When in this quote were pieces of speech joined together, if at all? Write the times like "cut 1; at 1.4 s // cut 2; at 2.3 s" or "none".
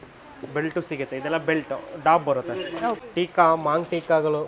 cut 1; at 3.0 s